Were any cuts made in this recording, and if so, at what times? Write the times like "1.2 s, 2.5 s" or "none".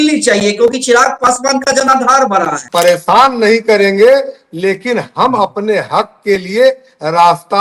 2.6 s